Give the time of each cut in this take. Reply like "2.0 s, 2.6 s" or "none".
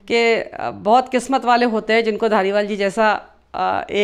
none